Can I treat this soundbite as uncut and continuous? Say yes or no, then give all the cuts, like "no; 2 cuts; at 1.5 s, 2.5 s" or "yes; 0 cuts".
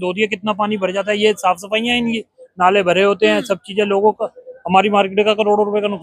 yes; 0 cuts